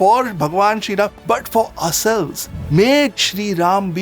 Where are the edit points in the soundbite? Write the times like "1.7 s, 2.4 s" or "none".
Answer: 1.2 s